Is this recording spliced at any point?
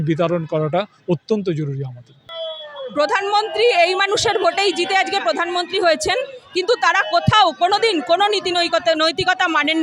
yes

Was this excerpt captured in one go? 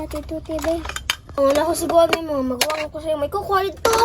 no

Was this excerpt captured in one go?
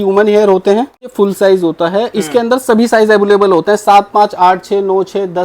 no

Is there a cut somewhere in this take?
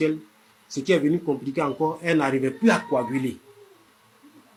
no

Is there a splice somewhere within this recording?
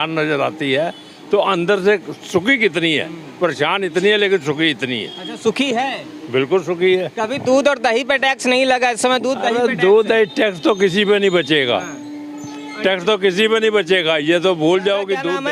no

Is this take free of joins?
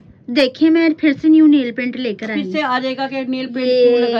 yes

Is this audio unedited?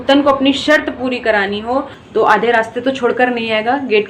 no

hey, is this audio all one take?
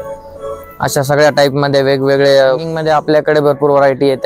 no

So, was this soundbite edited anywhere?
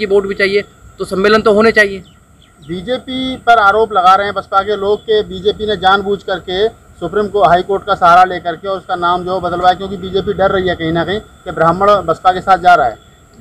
no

